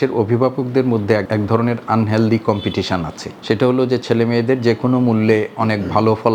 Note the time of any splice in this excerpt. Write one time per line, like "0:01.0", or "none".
none